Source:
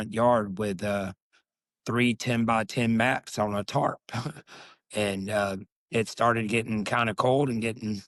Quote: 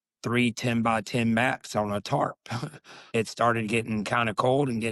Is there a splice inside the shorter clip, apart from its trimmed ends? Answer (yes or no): yes